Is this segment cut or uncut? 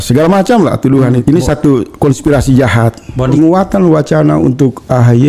cut